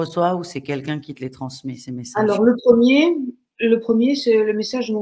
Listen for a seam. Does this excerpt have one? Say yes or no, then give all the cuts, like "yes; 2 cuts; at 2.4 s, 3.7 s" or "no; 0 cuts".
no; 0 cuts